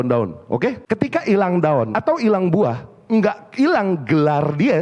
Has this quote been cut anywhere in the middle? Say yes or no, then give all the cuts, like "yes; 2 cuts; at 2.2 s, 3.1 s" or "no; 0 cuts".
yes; 2 cuts; at 0.8 s, 1.9 s